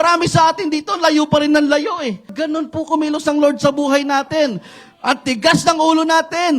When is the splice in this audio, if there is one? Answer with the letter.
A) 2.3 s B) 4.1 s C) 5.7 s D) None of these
A